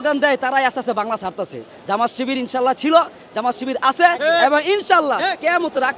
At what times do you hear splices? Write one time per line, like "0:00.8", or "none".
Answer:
none